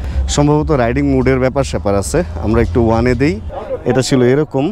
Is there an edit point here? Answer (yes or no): yes